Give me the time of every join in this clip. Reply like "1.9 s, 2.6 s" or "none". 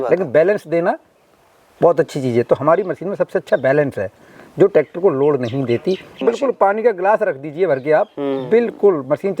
6.2 s